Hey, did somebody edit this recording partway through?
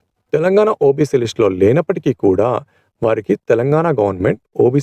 no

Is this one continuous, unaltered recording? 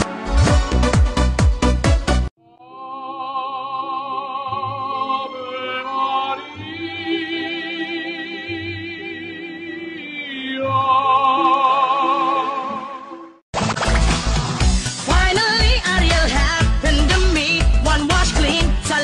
no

